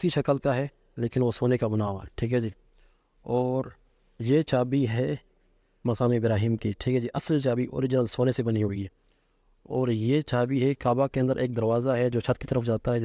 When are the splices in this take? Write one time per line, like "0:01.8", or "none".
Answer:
none